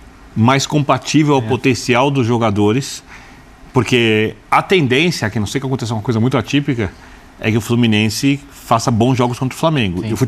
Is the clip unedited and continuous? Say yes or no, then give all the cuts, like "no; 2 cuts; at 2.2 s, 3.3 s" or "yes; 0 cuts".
yes; 0 cuts